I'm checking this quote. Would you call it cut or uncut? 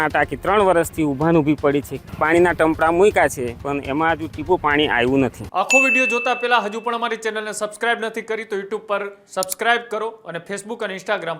cut